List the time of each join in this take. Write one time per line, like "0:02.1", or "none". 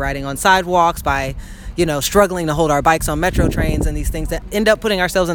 0:04.4